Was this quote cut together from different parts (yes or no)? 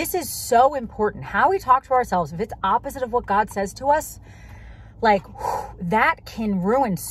no